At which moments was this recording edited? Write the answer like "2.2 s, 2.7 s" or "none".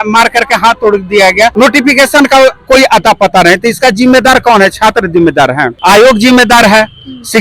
1.5 s, 5.7 s